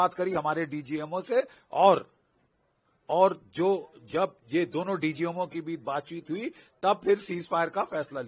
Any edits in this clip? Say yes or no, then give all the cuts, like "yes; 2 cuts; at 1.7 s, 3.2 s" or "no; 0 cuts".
no; 0 cuts